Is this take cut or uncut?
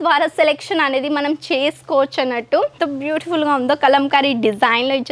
cut